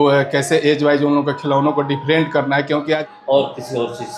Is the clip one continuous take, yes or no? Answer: no